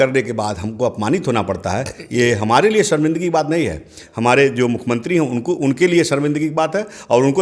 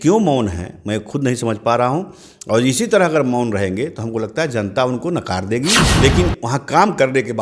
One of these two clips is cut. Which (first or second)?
second